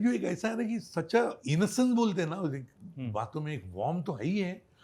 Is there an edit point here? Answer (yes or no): yes